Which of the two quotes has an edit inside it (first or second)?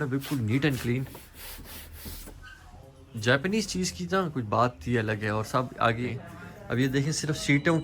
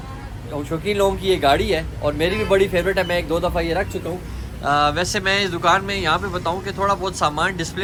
first